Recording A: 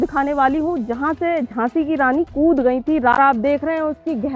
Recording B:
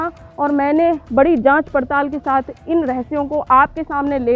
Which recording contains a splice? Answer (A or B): A